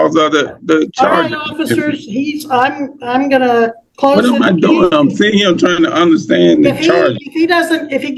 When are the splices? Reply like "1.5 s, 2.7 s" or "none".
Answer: none